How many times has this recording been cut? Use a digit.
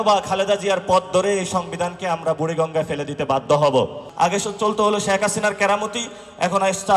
1